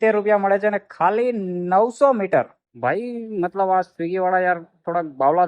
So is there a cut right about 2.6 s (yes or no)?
yes